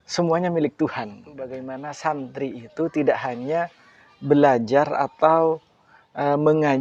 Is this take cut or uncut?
cut